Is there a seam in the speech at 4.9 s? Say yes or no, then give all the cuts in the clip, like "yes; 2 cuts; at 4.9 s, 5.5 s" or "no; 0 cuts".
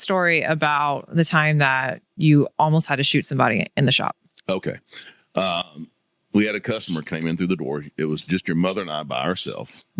no; 0 cuts